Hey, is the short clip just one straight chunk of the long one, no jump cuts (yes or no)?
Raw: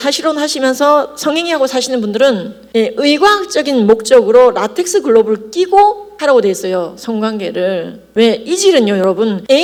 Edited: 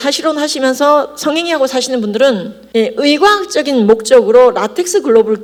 yes